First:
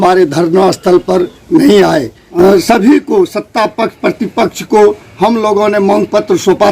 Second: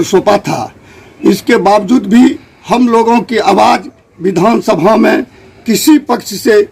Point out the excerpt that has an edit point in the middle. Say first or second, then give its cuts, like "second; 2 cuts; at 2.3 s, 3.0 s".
first; 1 cut; at 2.2 s